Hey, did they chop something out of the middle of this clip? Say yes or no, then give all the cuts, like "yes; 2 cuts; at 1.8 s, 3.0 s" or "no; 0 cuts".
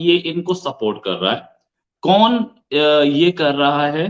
no; 0 cuts